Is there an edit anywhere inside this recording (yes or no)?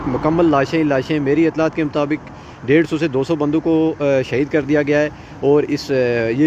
no